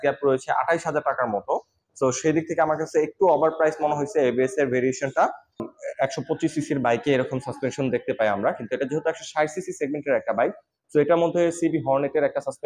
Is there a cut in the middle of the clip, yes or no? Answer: yes